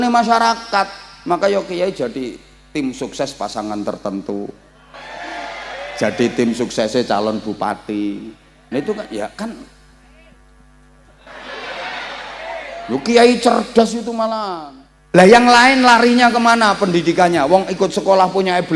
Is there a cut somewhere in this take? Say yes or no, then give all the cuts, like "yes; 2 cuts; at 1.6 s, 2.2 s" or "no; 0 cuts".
yes; 1 cut; at 14.4 s